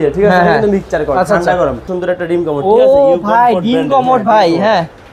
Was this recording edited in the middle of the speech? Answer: yes; 1 cut; at 1.9 s

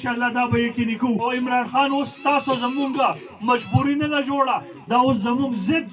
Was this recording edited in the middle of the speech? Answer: yes; 1 cut; at 1.3 s

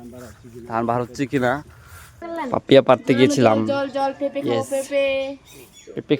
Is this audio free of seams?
no; 1 cut; at 2.2 s

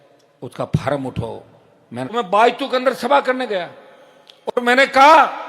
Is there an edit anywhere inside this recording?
yes; 1 cut; at 2.1 s

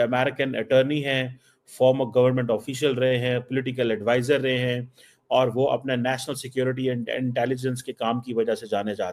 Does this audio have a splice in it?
no; 0 cuts

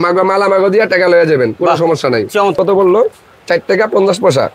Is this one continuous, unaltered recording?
no; 1 cut; at 2.5 s

